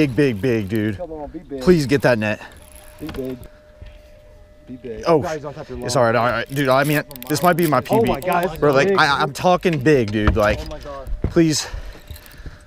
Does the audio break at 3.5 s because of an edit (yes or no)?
yes